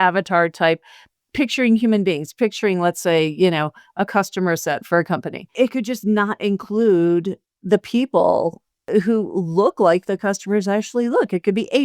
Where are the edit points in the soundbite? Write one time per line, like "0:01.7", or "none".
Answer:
0:08.7